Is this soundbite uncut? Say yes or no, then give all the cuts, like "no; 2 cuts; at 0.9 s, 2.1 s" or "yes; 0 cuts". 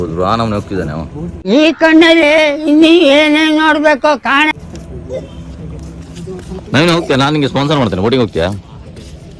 yes; 0 cuts